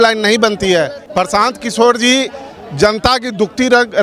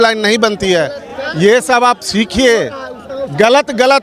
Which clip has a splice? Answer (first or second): first